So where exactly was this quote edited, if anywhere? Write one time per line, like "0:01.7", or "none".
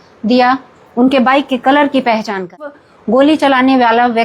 0:02.9